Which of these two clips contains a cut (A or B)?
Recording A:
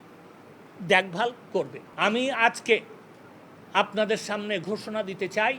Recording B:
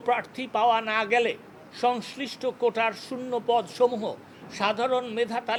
A